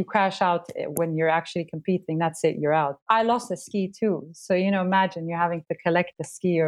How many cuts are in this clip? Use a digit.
1